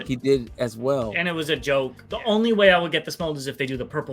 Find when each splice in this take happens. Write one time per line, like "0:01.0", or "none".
0:02.0